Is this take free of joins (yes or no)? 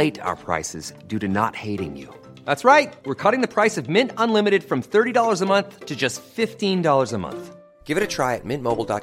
yes